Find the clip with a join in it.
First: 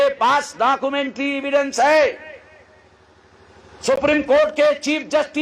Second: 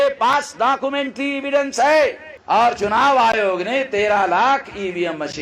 second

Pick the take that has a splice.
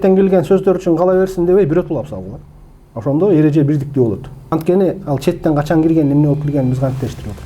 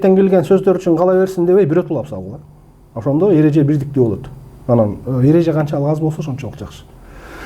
first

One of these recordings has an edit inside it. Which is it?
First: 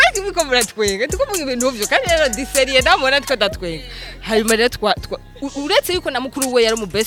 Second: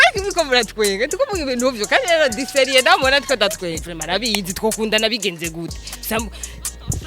second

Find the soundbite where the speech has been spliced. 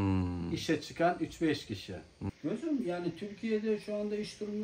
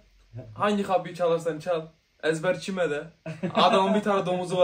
first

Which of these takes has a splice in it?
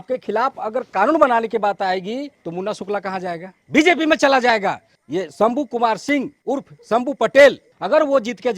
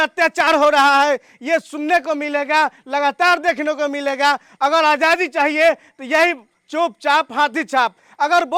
first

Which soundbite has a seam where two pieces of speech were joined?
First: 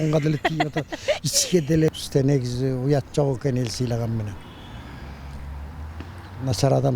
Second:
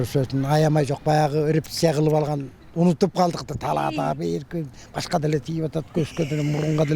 first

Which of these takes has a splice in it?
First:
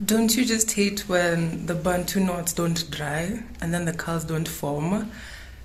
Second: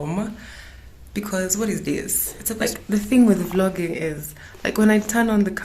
second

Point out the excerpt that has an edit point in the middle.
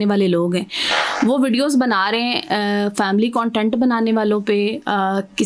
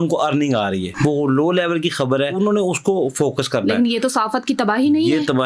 second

